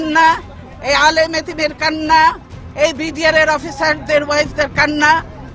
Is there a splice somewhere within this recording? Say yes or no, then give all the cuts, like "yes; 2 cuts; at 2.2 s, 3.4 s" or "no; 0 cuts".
no; 0 cuts